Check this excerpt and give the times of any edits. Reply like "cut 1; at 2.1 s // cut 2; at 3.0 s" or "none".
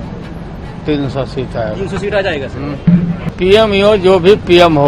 cut 1; at 3.2 s